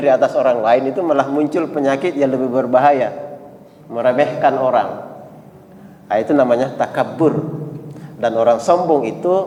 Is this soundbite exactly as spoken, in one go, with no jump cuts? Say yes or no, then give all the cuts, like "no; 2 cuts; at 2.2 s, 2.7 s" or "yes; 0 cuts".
yes; 0 cuts